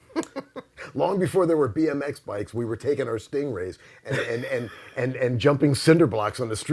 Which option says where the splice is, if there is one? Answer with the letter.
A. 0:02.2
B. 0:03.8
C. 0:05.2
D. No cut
D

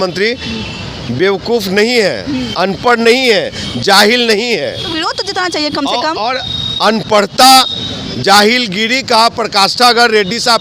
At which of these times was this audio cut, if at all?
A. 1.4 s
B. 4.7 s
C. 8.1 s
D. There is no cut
D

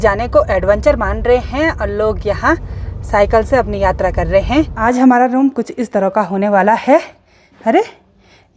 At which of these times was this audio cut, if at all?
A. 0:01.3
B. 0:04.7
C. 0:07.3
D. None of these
B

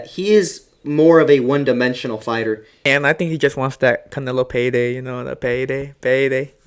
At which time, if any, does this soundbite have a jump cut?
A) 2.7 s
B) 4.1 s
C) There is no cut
A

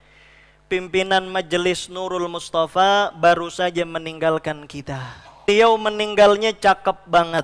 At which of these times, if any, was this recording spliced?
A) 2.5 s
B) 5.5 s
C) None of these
B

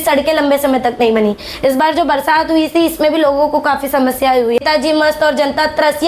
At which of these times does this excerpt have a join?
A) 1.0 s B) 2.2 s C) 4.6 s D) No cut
C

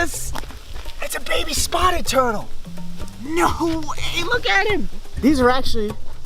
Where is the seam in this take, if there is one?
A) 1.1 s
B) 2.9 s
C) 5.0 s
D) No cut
C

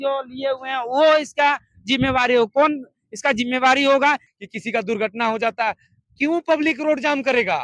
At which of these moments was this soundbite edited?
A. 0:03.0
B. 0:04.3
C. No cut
B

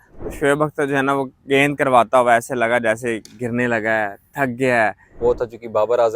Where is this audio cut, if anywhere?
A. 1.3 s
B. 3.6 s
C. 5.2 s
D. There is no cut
C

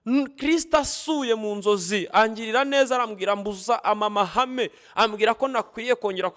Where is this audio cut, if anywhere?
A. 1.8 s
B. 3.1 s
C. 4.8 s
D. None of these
D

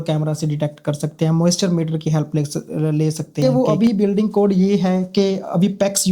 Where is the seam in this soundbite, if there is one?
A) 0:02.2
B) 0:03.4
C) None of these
B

